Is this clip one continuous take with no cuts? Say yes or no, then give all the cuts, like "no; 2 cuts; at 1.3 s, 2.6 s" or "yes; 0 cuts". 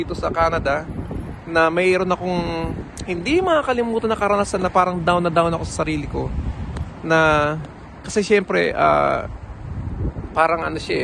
yes; 0 cuts